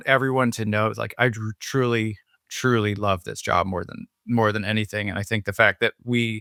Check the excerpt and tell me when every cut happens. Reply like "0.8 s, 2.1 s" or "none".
none